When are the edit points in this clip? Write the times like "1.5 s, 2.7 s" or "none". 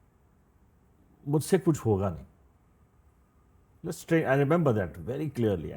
none

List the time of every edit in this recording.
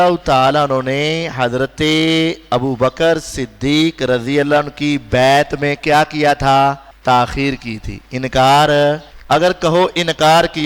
6.9 s, 9.1 s

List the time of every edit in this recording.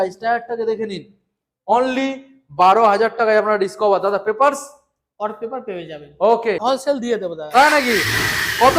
6.6 s

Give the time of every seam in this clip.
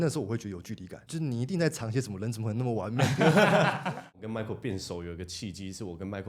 1.0 s, 4.2 s

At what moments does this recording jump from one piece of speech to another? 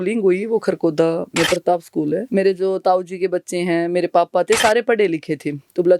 2.2 s

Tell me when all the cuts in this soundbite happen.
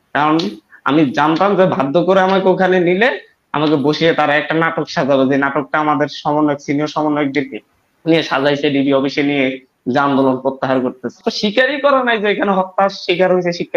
11.2 s

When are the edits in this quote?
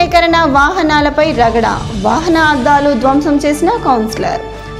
none

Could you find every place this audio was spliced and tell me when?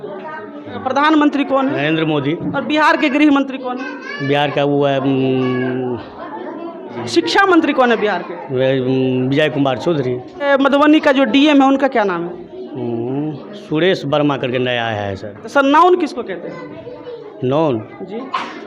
0.8 s, 7.0 s, 10.5 s, 15.5 s

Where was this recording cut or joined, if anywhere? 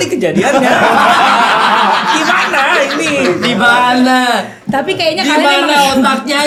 none

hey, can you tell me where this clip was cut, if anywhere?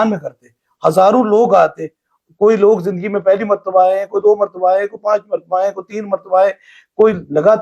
none

